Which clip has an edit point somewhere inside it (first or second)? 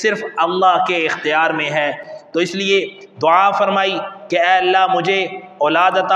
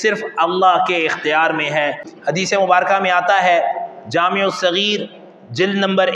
second